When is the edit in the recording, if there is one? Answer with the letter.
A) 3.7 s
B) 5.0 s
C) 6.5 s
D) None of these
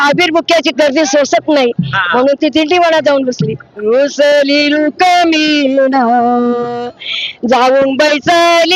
A